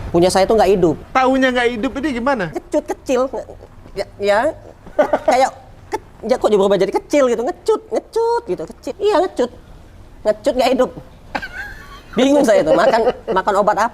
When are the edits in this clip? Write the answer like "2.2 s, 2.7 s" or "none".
1.0 s, 2.6 s, 8.9 s